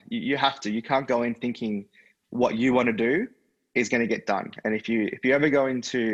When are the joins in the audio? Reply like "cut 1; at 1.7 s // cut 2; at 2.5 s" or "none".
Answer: none